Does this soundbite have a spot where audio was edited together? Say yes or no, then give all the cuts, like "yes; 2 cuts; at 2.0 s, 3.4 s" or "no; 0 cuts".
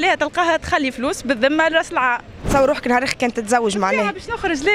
yes; 1 cut; at 2.3 s